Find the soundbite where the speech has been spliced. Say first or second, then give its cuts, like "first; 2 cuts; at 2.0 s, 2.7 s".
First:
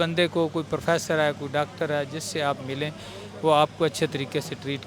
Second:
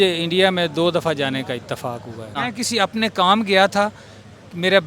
second; 1 cut; at 2.4 s